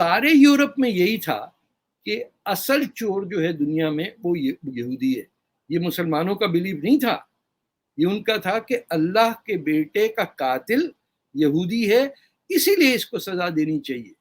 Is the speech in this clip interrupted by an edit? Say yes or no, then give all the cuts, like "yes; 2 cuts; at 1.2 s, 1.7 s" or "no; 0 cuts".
no; 0 cuts